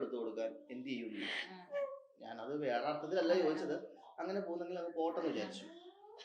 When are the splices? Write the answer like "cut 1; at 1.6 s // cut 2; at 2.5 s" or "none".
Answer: none